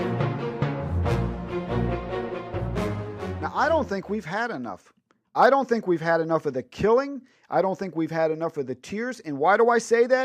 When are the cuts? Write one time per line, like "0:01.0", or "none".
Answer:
0:07.9